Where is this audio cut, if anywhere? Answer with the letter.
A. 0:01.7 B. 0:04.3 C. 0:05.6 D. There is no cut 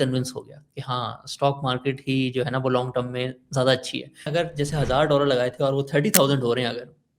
B